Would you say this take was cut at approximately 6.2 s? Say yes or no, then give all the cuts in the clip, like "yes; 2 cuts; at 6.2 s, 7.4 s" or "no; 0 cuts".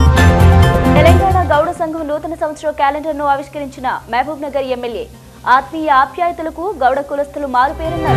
no; 1 cut; at 0.9 s